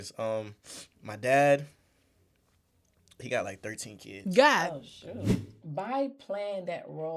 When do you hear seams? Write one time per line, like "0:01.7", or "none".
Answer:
0:05.4